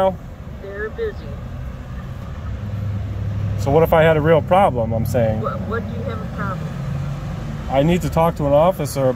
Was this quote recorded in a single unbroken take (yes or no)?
yes